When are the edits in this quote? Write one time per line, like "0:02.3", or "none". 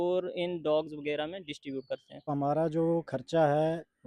0:02.3